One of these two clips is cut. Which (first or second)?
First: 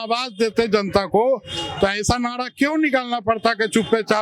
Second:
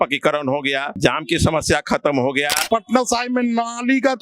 second